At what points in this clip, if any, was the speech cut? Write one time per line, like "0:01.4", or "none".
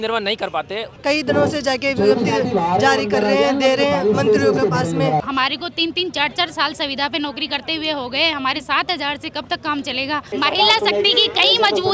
0:00.9
0:05.2
0:10.3